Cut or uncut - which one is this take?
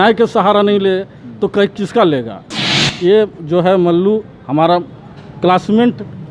cut